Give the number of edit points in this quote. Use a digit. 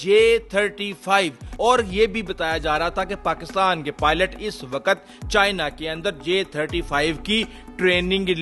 1